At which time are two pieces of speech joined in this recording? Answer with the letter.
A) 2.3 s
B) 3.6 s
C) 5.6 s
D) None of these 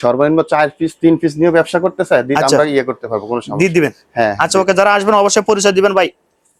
D